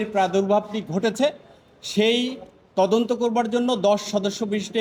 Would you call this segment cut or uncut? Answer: uncut